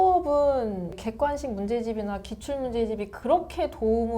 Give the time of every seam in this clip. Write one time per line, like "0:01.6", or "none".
0:01.0